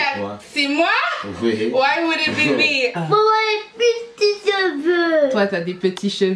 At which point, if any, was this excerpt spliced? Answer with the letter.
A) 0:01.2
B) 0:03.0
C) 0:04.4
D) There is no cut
B